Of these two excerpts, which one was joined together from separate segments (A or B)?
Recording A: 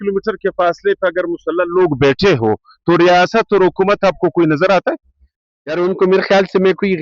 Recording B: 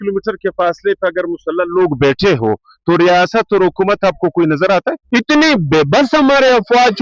B